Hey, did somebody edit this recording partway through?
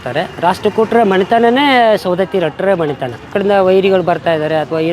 yes; 1 cut; at 3.3 s

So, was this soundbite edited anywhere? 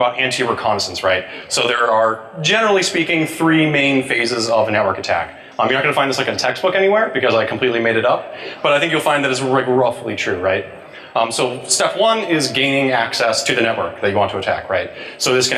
no; 0 cuts

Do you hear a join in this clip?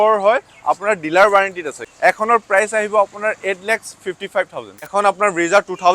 yes; 2 cuts; at 1.8 s, 4.9 s

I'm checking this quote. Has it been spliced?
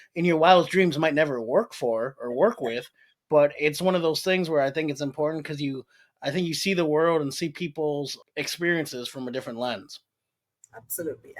yes; 1 cut; at 8.2 s

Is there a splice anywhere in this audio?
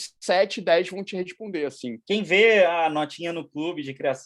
yes; 1 cut; at 1.9 s

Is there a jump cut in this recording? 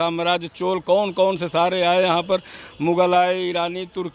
no; 0 cuts

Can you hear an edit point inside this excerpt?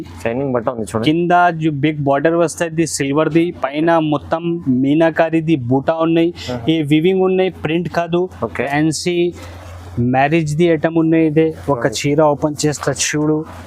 yes; 1 cut; at 8.7 s

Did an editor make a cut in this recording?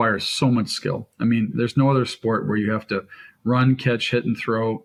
no; 0 cuts

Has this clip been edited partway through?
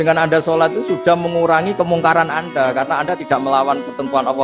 no; 0 cuts

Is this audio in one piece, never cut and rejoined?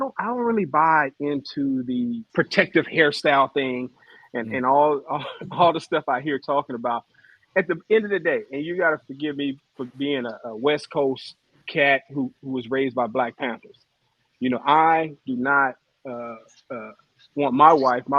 no; 1 cut; at 2.3 s

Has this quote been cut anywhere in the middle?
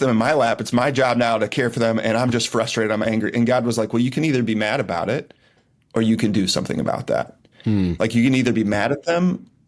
no; 0 cuts

